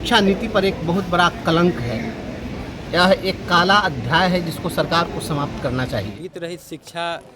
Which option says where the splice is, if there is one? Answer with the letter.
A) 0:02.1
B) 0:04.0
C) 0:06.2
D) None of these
C